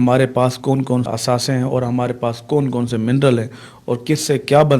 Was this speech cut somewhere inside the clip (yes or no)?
yes